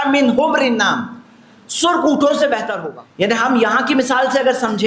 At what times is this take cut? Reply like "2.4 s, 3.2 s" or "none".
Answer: 2.7 s